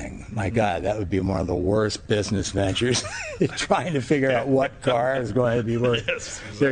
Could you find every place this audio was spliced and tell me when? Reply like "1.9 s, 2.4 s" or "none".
none